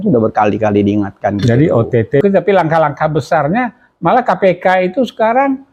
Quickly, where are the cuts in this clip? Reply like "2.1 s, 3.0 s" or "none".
2.2 s